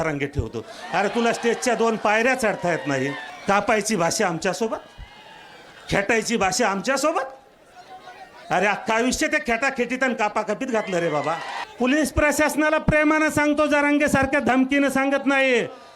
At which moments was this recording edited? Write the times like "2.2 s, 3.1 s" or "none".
3.3 s, 11.6 s